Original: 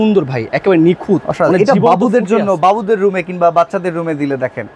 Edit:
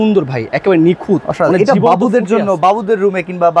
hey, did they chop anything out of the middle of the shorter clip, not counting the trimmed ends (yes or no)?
no